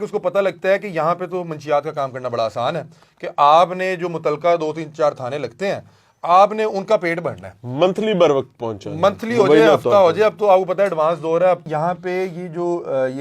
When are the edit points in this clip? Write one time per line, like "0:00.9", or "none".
0:11.6